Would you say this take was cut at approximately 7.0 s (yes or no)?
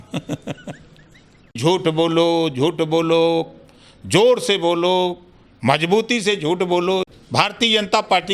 yes